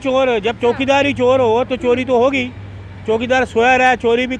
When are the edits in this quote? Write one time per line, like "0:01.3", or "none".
none